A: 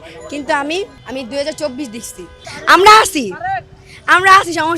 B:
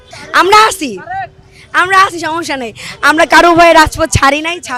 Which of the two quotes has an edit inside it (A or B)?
A